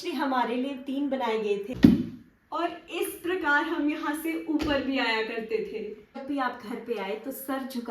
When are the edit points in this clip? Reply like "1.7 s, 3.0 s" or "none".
1.7 s, 6.2 s